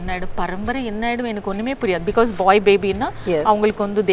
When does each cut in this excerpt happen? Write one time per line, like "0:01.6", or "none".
none